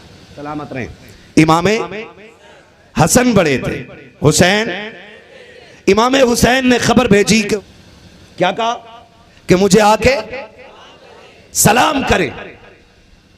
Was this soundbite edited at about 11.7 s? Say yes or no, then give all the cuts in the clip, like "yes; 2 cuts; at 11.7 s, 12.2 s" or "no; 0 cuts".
no; 1 cut; at 7.6 s